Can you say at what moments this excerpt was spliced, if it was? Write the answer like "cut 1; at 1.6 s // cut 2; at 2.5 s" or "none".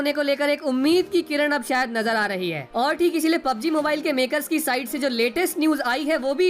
cut 1; at 2.6 s